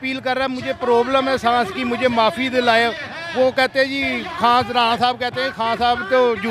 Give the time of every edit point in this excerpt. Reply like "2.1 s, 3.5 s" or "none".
none